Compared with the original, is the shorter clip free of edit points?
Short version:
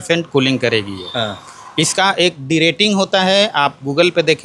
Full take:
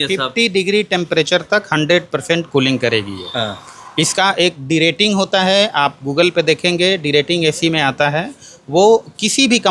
yes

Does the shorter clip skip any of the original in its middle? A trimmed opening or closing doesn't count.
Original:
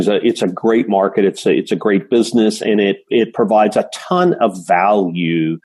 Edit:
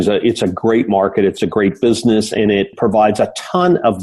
yes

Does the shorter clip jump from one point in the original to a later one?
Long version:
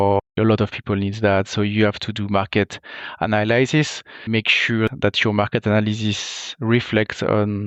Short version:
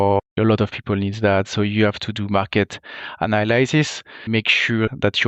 no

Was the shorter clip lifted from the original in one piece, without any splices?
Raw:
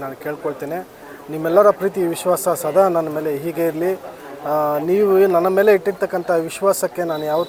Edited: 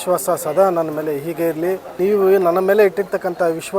no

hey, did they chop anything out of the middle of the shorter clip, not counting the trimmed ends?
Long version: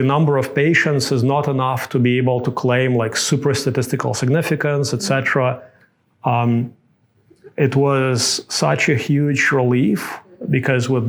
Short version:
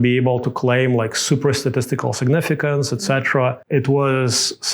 yes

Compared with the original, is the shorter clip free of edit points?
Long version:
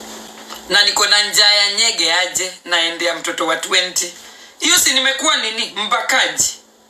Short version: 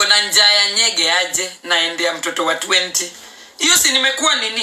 yes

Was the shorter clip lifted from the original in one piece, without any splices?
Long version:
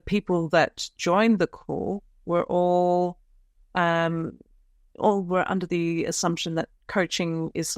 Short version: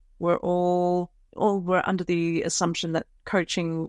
no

